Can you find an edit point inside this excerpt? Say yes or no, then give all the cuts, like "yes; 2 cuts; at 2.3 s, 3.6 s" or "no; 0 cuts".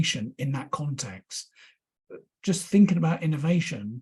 no; 0 cuts